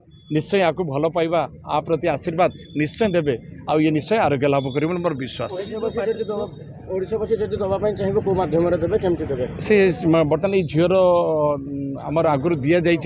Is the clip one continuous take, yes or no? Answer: yes